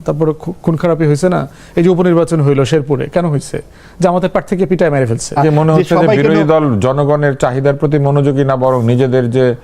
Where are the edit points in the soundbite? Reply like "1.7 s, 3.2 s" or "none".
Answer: 5.4 s